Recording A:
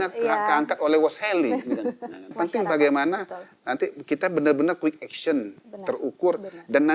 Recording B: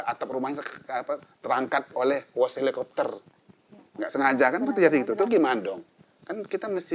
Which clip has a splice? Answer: A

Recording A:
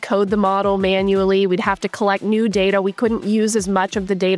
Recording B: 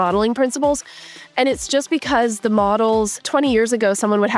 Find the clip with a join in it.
B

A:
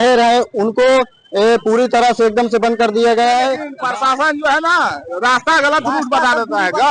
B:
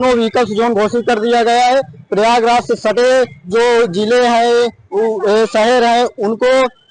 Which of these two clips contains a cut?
A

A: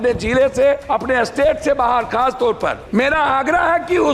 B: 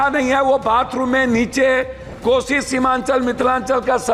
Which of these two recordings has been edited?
A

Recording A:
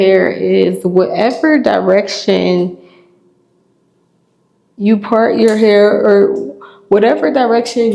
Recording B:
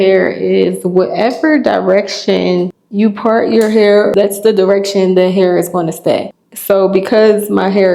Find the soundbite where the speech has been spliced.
B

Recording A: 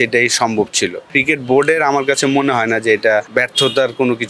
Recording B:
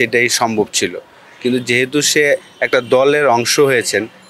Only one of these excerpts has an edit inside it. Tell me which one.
A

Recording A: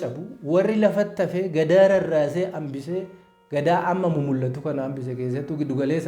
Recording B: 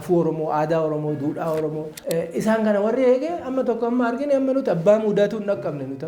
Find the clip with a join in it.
B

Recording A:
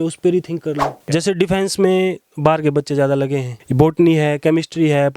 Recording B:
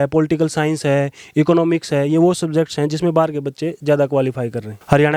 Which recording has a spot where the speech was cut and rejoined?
A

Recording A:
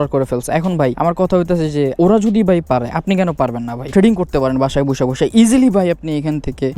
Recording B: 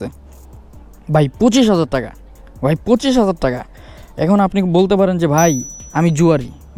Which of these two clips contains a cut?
A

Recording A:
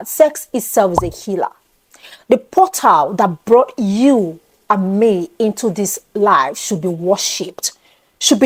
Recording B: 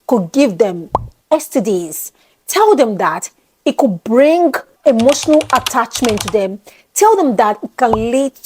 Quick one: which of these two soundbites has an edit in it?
B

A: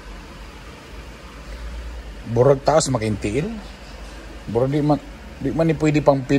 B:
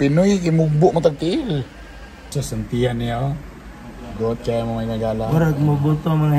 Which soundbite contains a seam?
B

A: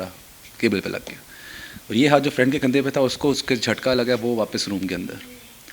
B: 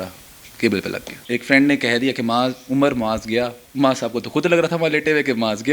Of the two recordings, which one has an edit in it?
B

